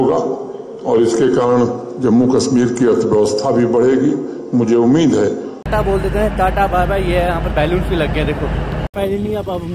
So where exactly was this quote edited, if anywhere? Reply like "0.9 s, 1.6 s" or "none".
none